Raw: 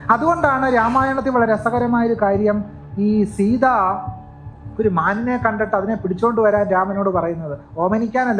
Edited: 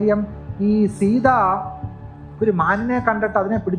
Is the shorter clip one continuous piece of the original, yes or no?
yes